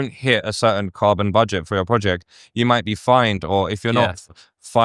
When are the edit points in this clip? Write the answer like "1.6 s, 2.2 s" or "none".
none